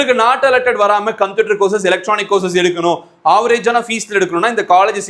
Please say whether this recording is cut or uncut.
uncut